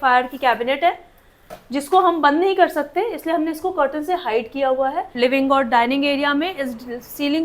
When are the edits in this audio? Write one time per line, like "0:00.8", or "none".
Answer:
0:05.1